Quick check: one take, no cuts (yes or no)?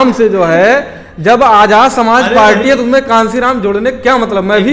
yes